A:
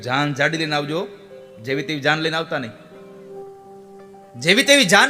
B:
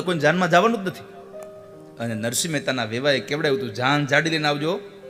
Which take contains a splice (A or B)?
A